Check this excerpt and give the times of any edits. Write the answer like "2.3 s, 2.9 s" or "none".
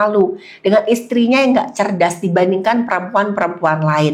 none